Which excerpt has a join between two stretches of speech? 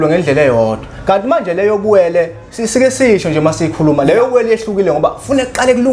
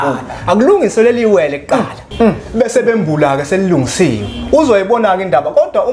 second; 1 cut; at 2.0 s

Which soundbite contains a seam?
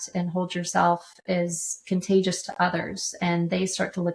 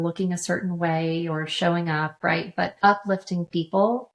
second; 1 cut; at 2.8 s

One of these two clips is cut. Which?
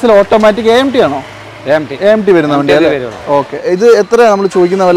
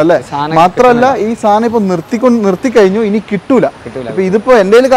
first; 1 cut; at 3.6 s

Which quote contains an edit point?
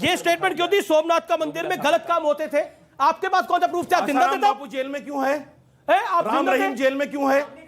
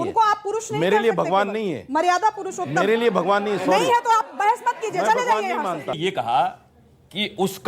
second; 1 cut; at 6.0 s

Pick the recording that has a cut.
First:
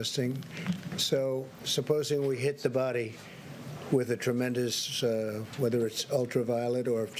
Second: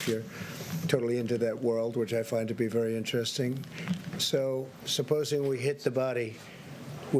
second; 1 cut; at 1.0 s

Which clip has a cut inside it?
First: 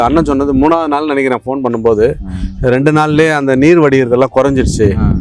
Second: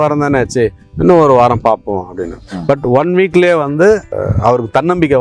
second; 1 cut; at 4.1 s

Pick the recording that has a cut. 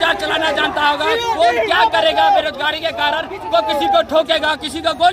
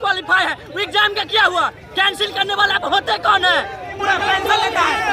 second; 1 cut; at 3.9 s

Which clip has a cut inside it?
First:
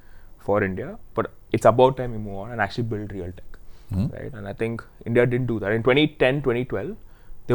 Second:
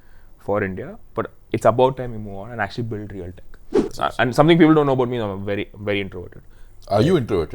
second; 1 cut; at 3.5 s

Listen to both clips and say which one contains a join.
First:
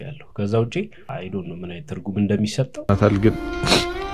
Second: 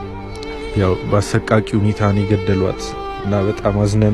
first; 1 cut; at 2.9 s

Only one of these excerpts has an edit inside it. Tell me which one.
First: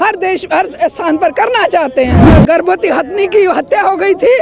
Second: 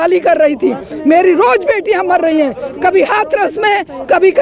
first; 1 cut; at 2.3 s

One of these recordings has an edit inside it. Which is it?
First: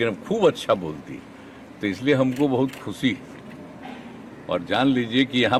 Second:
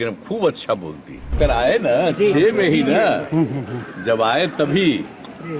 second; 1 cut; at 1.3 s

